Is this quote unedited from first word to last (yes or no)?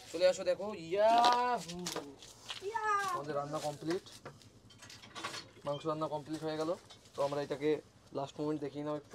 yes